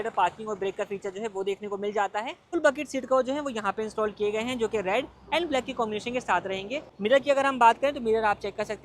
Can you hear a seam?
yes; 2 cuts; at 2.5 s, 6.9 s

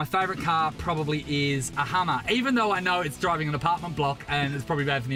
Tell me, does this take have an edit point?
no; 0 cuts

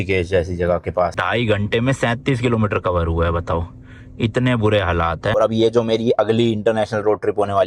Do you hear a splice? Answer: yes; 2 cuts; at 1.2 s, 5.3 s

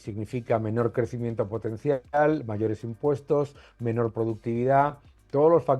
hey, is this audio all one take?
yes; 0 cuts

